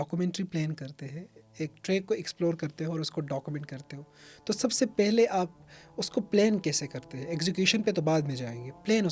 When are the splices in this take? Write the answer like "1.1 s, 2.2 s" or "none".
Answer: none